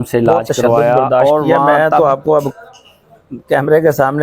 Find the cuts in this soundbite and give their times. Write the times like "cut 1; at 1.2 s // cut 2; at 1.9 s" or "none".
cut 1; at 1.6 s